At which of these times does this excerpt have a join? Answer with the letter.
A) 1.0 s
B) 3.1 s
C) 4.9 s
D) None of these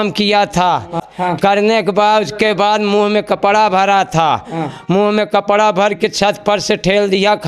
A